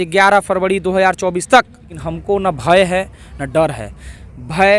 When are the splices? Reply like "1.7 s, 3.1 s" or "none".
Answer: 2.0 s